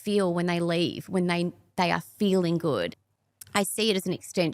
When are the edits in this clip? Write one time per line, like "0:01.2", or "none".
0:02.9